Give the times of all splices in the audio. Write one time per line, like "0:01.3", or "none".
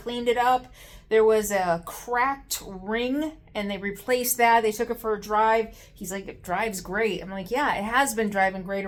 none